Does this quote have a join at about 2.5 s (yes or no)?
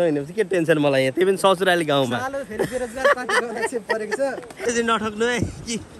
no